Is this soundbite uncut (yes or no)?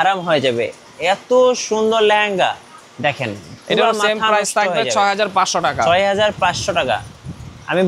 yes